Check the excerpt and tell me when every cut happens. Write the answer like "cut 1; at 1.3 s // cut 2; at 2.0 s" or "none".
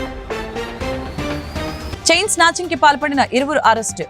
cut 1; at 1.8 s